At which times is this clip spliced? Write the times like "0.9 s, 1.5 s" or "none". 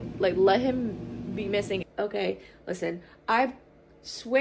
1.8 s